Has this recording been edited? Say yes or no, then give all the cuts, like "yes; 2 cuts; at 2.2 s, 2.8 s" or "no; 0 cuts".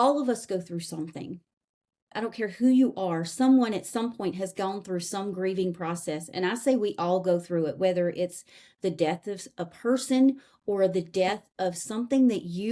no; 0 cuts